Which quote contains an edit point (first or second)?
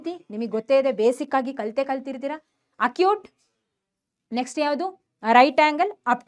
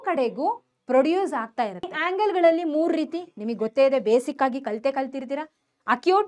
second